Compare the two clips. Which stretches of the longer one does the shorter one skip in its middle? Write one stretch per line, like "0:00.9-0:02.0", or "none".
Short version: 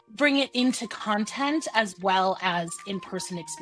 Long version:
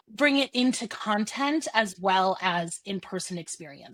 none